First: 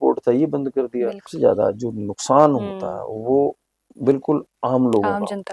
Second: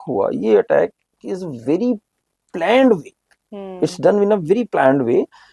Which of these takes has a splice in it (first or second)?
first